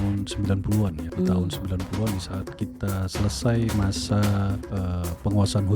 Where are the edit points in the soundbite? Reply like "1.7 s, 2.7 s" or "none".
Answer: 1.0 s, 4.6 s